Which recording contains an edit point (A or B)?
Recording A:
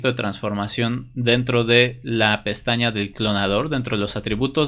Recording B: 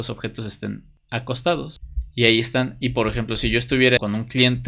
B